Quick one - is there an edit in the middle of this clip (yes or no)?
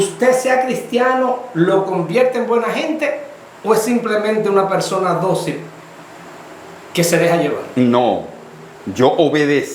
no